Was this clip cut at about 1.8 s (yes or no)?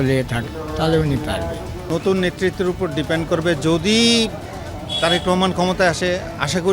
yes